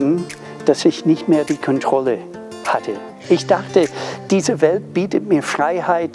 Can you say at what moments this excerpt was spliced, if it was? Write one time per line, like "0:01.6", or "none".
0:03.2

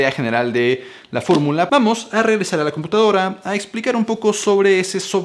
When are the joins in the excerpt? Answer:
0:01.7

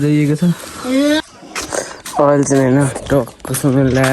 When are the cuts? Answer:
0:01.2

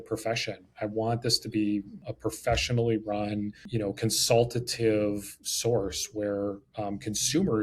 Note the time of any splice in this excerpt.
0:02.0
0:03.6

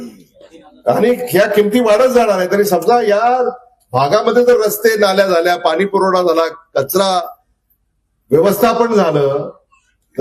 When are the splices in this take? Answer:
none

